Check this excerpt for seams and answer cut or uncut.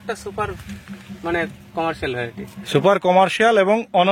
uncut